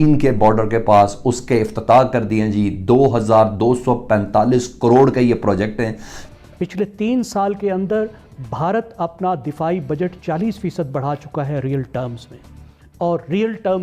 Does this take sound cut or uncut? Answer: cut